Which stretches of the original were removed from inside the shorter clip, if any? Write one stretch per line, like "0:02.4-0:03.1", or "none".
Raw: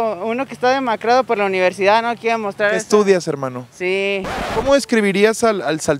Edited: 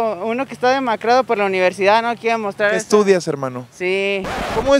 none